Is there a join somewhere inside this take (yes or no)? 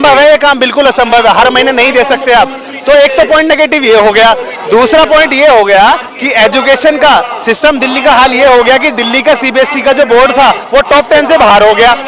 no